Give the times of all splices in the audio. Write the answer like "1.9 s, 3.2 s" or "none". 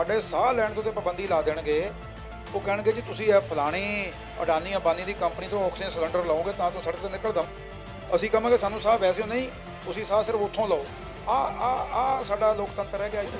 none